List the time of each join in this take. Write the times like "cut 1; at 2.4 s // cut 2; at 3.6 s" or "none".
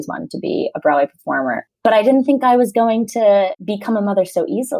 cut 1; at 3.6 s